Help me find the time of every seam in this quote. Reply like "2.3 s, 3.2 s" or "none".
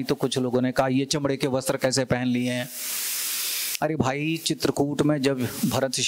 none